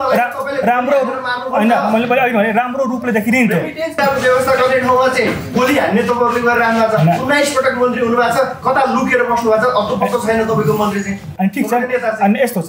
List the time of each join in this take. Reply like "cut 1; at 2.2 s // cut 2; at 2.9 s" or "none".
cut 1; at 3.9 s